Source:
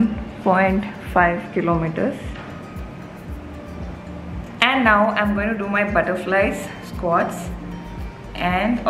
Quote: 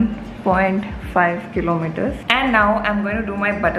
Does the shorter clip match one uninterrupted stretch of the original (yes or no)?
no